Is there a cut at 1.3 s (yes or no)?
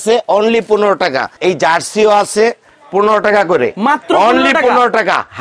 yes